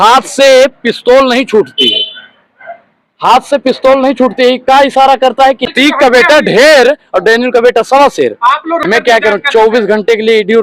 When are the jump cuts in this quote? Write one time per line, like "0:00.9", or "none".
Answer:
0:05.7
0:08.8